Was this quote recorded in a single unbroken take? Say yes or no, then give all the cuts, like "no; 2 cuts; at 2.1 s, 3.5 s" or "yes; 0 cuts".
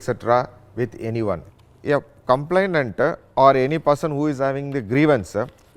no; 1 cut; at 1.5 s